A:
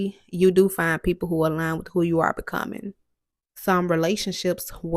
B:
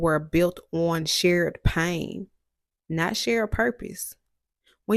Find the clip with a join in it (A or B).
A